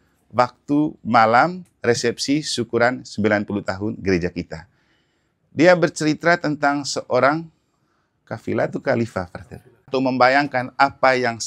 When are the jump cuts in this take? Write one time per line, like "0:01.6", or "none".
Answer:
0:09.9